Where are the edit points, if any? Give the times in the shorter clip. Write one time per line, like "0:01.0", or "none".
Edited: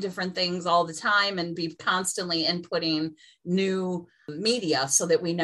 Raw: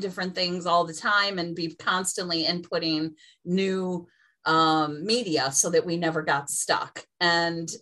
0:04.3